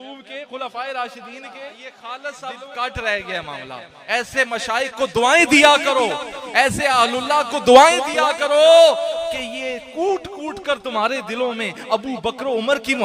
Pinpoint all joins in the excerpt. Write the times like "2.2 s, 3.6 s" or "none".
1.9 s